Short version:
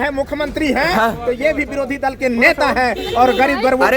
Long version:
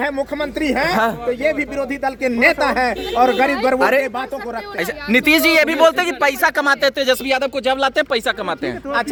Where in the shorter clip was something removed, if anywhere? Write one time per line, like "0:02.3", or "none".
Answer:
none

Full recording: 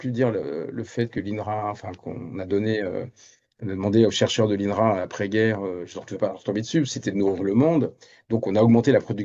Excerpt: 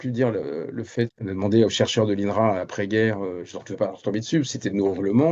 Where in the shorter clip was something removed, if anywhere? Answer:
0:01.1

